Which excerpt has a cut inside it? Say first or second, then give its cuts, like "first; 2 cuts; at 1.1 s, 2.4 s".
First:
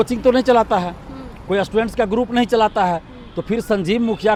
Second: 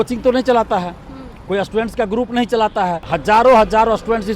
second; 1 cut; at 3.1 s